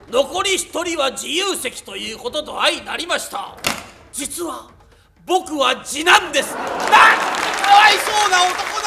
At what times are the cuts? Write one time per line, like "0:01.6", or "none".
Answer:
none